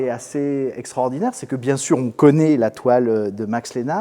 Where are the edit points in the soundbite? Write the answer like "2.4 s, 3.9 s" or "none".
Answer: none